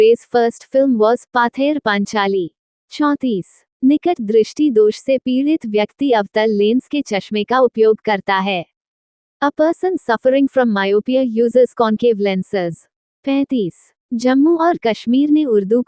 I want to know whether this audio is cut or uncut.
uncut